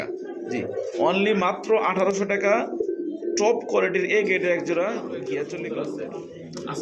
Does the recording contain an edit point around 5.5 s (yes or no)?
yes